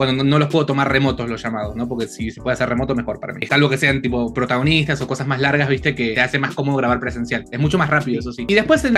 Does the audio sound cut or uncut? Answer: uncut